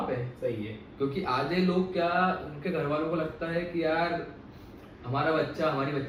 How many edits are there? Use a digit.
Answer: 0